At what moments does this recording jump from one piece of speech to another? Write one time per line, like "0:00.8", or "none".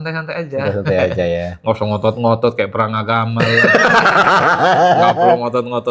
none